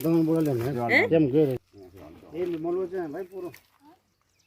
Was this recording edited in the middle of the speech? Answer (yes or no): no